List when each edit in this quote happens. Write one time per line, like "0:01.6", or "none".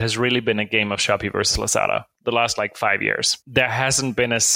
0:03.3